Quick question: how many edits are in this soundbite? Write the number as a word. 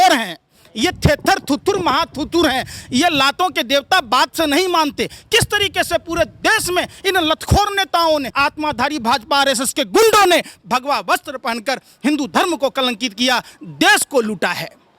zero